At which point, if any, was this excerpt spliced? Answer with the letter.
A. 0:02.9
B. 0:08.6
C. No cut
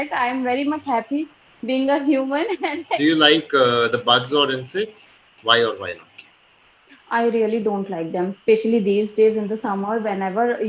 A